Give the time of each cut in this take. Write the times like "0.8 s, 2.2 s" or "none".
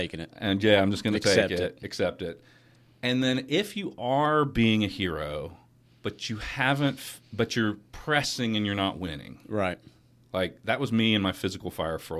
none